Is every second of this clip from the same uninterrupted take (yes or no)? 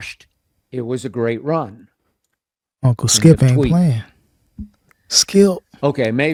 yes